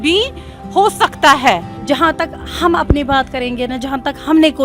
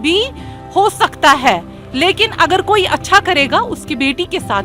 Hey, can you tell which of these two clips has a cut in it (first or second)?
first